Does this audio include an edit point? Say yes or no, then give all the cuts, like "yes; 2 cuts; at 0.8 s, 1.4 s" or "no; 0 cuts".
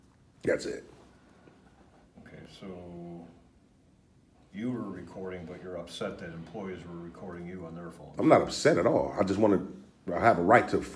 no; 0 cuts